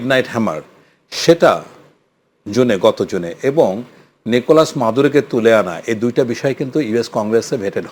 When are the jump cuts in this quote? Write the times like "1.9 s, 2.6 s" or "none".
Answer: none